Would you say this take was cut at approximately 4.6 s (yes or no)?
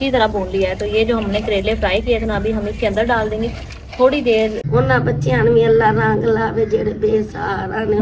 yes